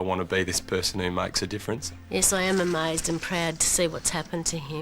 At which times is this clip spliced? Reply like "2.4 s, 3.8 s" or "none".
1.9 s